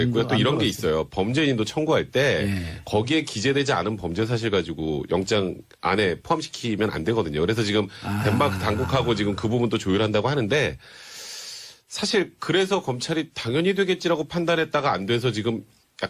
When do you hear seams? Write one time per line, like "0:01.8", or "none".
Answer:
0:13.0